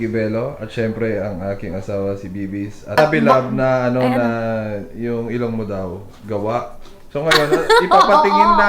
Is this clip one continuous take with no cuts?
no; 1 cut; at 3.0 s

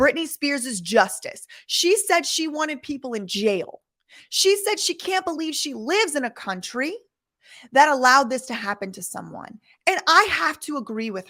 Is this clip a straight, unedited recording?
yes; 0 cuts

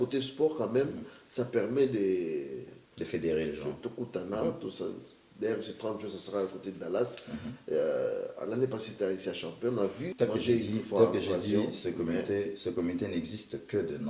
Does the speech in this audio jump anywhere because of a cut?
yes; 1 cut; at 10.1 s

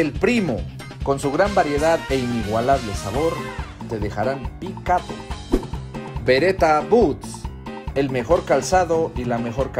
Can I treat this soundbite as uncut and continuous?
yes; 0 cuts

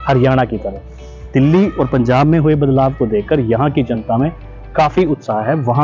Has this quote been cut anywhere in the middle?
no; 0 cuts

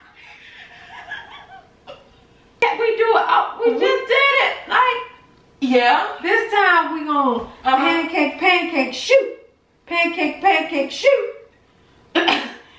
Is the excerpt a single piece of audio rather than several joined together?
no; 1 cut; at 2.6 s

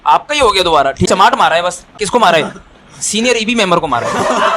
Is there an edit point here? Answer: yes; 2 cuts; at 1.1 s, 1.9 s

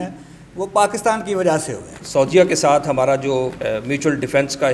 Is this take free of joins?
no; 2 cuts; at 2.0 s, 3.6 s

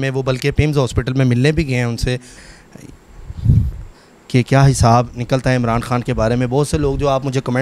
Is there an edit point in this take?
yes; 1 cut; at 2.4 s

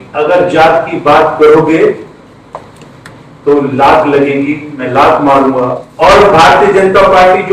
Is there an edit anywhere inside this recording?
yes; 1 cut; at 5.8 s

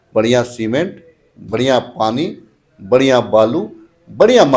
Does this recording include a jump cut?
no; 0 cuts

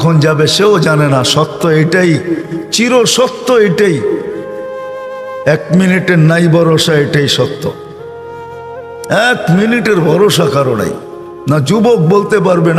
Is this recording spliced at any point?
yes; 2 cuts; at 7.9 s, 9.1 s

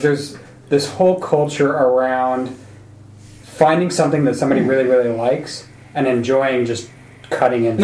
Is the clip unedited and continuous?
yes; 0 cuts

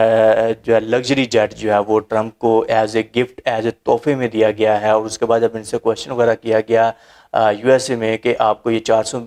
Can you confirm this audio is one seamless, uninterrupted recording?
yes; 0 cuts

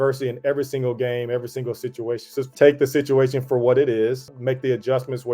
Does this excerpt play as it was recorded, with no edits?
no; 2 cuts; at 2.5 s, 4.3 s

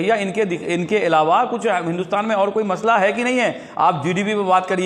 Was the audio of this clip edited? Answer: no; 0 cuts

